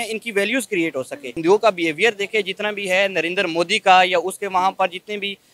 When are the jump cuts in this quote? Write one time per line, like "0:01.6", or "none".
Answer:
0:01.3